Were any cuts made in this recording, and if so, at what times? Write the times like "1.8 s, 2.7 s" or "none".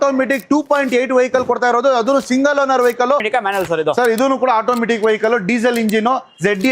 3.3 s

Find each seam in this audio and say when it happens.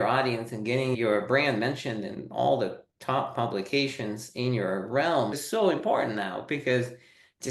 1.0 s, 5.4 s

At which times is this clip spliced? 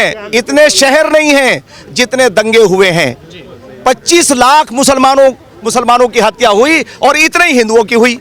none

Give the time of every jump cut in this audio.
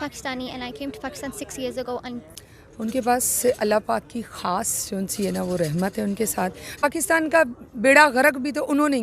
2.2 s, 6.8 s

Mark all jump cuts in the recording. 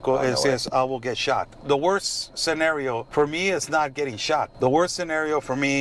1.5 s, 3.1 s, 4.5 s

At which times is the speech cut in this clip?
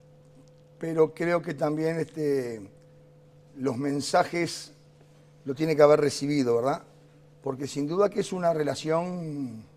3.7 s

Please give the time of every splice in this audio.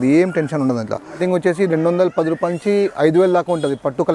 1.2 s

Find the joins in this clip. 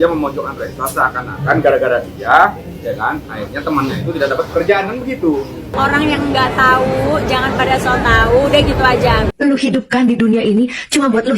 5.7 s, 9.2 s

